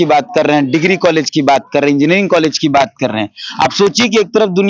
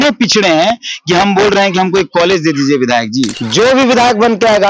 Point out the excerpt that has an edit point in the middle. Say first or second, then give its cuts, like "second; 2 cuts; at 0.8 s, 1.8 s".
second; 1 cut; at 3.4 s